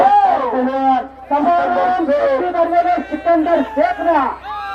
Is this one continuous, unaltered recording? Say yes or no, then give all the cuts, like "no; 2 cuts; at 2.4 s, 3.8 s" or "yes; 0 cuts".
yes; 0 cuts